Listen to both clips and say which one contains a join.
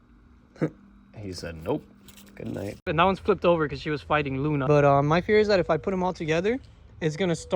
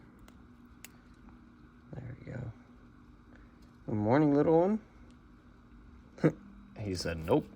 first; 2 cuts; at 2.9 s, 4.6 s

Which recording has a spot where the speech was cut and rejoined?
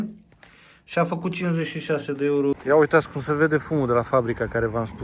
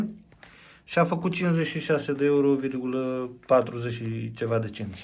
first; 1 cut; at 2.6 s

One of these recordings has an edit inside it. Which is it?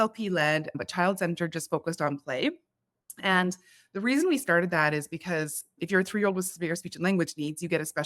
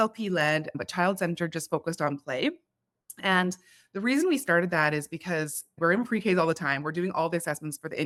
first; 1 cut; at 5.7 s

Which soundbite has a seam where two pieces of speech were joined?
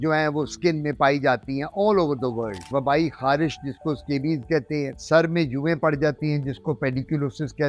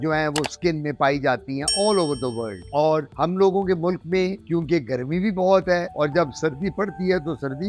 first; 1 cut; at 2.7 s

